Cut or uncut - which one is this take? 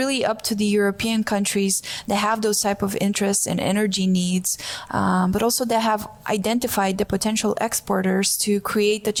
uncut